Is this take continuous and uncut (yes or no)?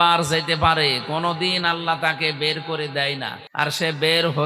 no